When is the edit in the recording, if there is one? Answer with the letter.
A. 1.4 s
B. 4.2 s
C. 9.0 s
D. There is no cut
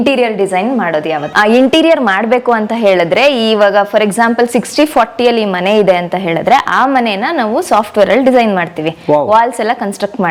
A